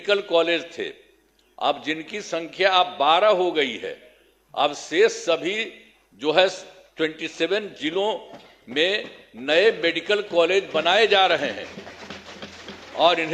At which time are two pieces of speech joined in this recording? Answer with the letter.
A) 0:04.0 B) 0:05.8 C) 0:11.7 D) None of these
D